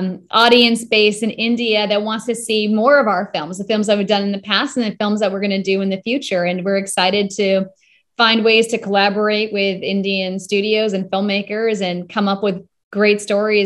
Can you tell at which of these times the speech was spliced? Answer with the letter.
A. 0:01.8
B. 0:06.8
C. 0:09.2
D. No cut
D